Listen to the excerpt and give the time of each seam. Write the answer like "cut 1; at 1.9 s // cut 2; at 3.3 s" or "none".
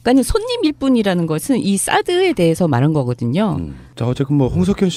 none